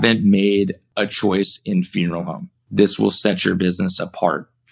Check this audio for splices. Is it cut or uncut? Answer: uncut